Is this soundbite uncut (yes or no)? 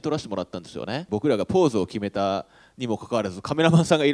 no